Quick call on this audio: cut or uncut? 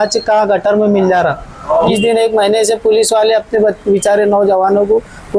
cut